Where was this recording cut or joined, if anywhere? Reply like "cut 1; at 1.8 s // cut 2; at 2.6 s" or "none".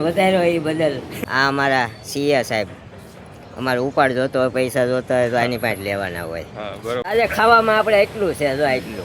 cut 1; at 1.1 s // cut 2; at 7.0 s